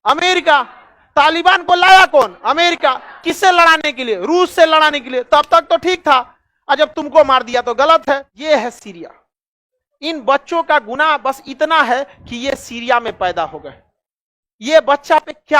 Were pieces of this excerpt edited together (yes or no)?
yes